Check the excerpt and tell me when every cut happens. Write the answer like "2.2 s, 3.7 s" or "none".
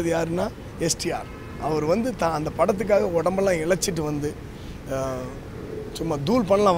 none